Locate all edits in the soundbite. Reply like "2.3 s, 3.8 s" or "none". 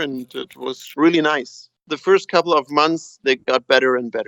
1.8 s